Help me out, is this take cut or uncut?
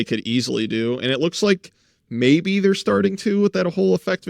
uncut